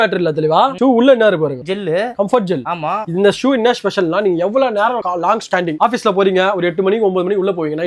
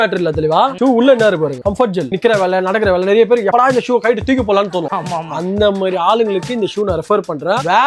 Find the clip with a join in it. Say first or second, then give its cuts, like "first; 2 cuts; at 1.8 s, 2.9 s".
second; 1 cut; at 2.1 s